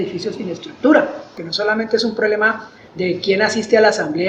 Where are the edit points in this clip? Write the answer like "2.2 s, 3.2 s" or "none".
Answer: 1.4 s